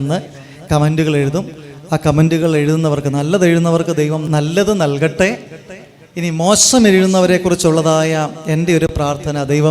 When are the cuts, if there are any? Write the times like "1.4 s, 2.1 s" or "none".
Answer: 2.3 s, 4.2 s